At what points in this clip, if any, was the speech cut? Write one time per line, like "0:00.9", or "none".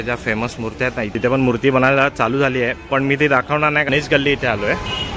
0:01.1
0:03.9